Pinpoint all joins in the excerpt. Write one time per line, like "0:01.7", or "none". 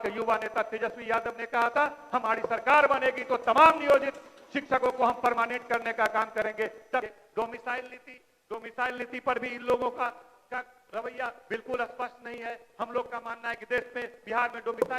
0:07.1